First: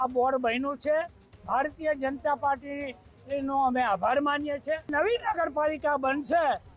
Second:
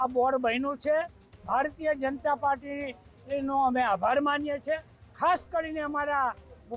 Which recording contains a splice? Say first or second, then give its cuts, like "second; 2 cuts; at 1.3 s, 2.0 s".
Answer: first; 1 cut; at 4.9 s